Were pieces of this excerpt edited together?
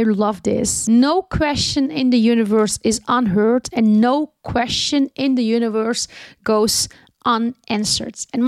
no; 0 cuts

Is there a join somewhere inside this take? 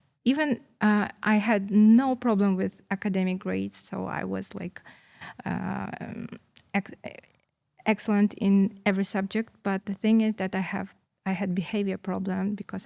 no; 0 cuts

